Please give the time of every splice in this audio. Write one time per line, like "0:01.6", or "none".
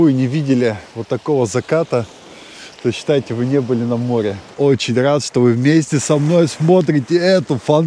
0:04.5